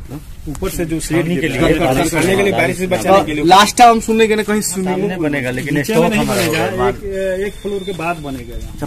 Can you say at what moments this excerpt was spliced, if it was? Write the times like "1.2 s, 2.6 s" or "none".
5.1 s